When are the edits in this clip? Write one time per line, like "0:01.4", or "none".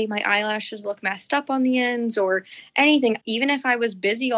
0:03.2